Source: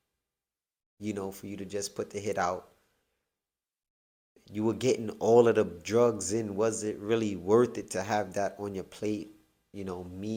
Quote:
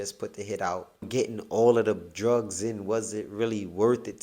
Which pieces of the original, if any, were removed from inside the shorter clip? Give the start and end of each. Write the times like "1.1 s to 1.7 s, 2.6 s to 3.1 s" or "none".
2.8 s to 4.8 s